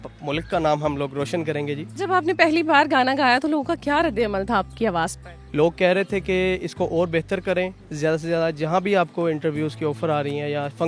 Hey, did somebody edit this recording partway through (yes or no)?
yes